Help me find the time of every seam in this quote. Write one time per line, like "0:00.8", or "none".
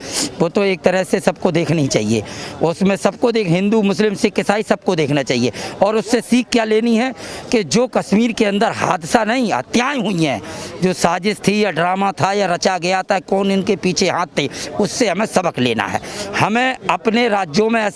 none

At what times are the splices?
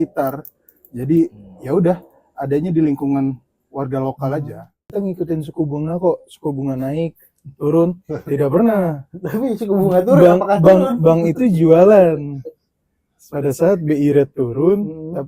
0:04.8

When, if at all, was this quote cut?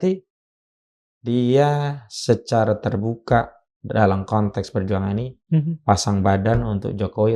none

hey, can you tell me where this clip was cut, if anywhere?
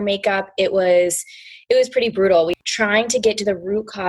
0:02.6

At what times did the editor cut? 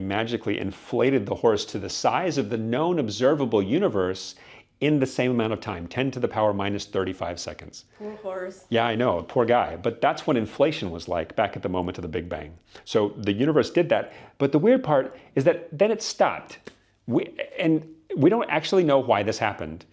none

